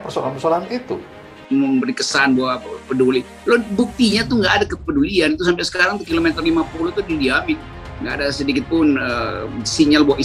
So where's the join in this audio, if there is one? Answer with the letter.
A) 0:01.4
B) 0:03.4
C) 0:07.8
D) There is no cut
A